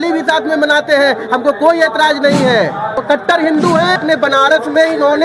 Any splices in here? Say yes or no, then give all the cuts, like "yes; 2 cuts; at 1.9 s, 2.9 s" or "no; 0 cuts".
yes; 2 cuts; at 3.0 s, 4.0 s